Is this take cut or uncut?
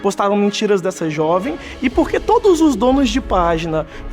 cut